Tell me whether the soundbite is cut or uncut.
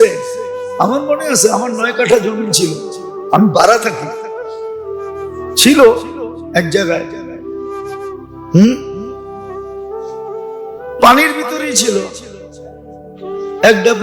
uncut